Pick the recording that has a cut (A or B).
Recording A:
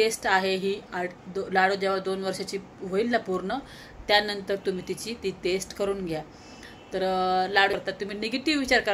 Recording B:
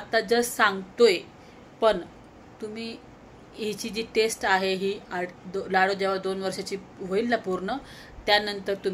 A